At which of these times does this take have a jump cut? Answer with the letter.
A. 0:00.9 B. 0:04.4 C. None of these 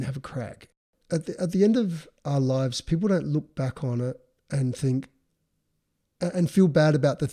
A